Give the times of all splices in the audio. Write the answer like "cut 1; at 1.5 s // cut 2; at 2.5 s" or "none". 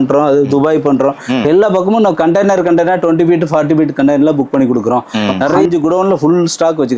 cut 1; at 5.6 s